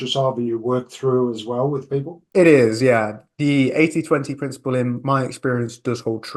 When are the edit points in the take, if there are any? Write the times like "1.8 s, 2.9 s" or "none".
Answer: 2.2 s